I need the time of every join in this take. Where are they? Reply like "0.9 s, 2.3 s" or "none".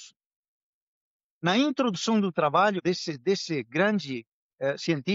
2.8 s

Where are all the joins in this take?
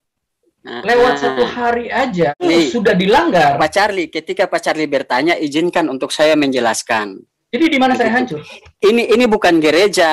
2.4 s

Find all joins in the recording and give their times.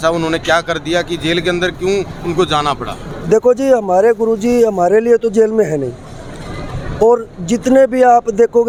none

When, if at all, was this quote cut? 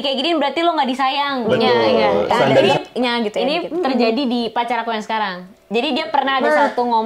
2.7 s

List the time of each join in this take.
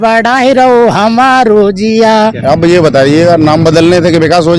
2.4 s

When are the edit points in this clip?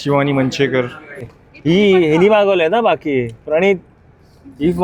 1.3 s

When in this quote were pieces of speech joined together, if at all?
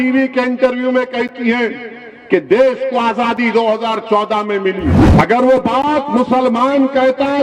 5.0 s

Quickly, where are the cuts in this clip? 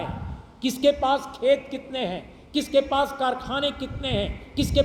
none

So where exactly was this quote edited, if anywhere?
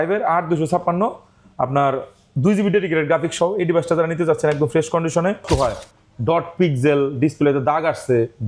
5.4 s

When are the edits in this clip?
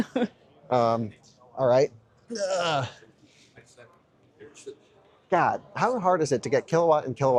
none

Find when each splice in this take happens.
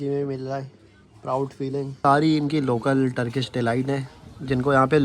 2.0 s

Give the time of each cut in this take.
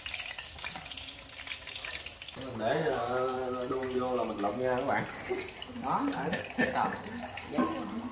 2.3 s

